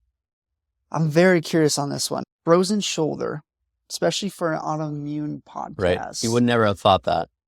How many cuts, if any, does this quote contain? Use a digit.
0